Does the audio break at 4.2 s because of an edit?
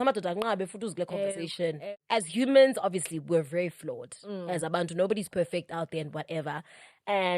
no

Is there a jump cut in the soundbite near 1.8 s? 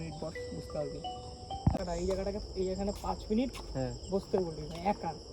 yes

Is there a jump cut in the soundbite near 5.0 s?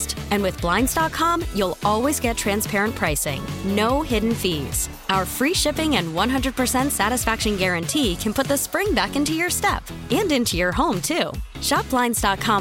no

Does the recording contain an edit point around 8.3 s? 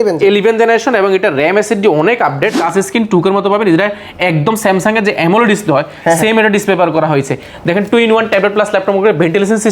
no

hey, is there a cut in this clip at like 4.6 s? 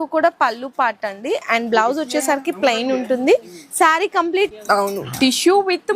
yes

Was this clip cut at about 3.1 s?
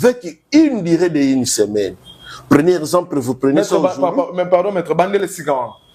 no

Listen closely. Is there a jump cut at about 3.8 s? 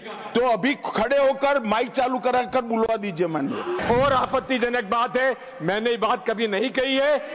yes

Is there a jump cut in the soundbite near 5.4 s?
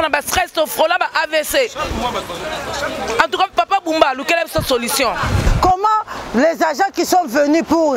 yes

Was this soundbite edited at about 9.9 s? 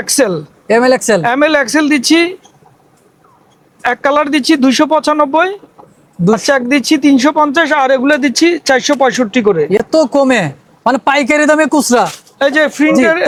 no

